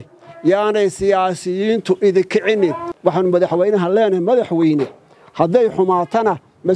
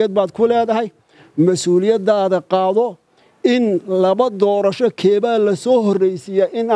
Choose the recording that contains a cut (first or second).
first